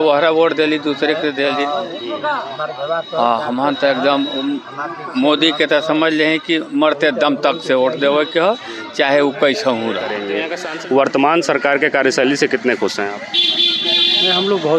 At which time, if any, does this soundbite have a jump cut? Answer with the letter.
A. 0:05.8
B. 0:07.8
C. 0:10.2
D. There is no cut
C